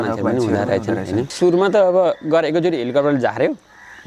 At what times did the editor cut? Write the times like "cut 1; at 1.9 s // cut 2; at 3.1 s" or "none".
cut 1; at 1.3 s